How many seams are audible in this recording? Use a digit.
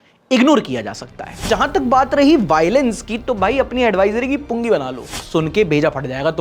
2